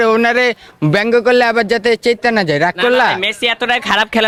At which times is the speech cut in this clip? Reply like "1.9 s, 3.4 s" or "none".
none